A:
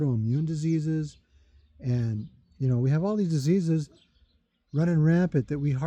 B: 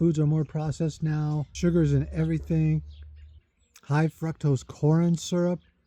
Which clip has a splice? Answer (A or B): B